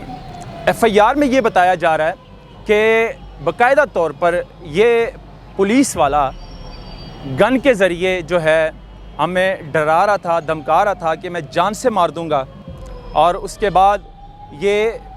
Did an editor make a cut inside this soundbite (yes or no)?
no